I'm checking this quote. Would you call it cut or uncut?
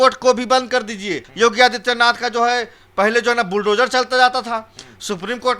cut